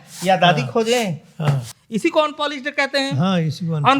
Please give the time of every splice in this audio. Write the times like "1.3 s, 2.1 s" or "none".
1.8 s